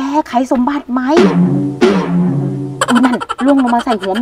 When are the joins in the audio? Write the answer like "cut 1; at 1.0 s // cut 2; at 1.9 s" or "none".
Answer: cut 1; at 3.3 s